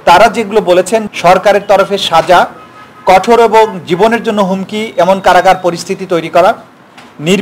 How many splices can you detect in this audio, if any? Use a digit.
1